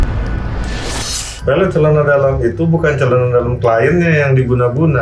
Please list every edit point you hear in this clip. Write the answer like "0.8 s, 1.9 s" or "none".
none